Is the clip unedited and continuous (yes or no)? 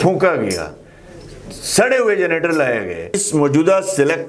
no